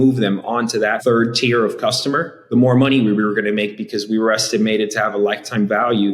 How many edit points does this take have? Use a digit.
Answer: 2